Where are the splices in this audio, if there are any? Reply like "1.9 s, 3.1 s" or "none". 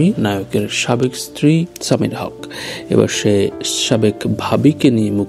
none